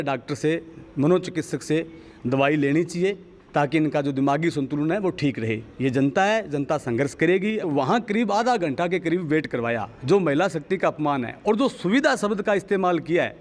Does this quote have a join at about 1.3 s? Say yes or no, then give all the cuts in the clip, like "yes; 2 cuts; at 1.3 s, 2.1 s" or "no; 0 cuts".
no; 1 cut; at 7.6 s